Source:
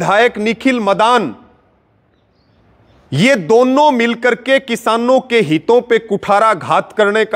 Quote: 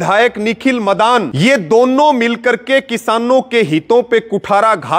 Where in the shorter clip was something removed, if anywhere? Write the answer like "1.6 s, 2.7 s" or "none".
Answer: 1.3 s